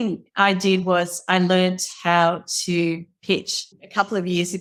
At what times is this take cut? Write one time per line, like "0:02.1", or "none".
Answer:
none